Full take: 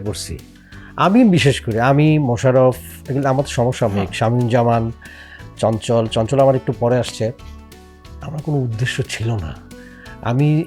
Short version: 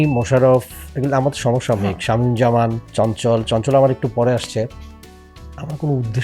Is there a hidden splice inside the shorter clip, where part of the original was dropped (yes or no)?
yes